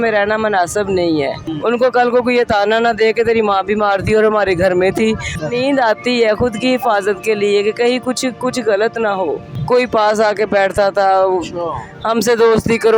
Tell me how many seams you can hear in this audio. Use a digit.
3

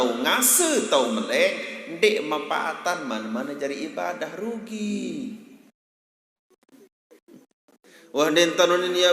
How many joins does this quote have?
1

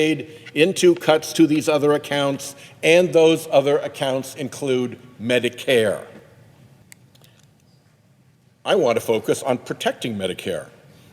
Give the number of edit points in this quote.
1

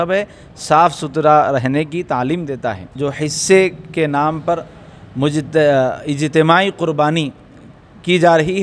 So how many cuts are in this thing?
1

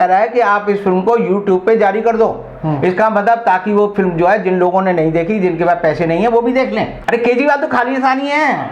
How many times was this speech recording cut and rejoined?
1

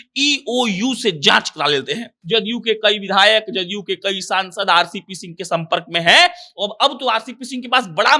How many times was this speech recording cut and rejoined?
1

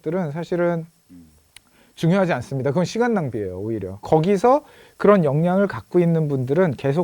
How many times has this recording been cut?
1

